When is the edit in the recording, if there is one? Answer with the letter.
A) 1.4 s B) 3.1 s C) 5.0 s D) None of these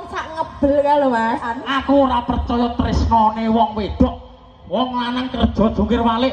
A